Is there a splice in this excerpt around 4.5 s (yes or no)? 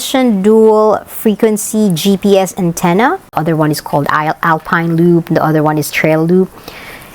no